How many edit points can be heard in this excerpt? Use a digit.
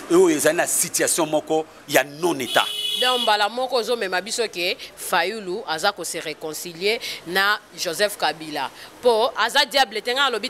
0